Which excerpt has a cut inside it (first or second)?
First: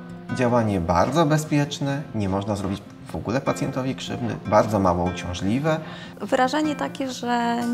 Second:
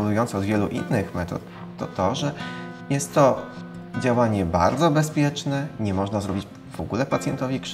first